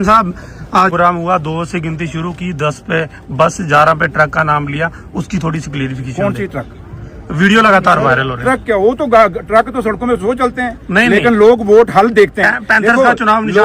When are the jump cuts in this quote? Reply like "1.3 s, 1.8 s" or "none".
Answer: 0.9 s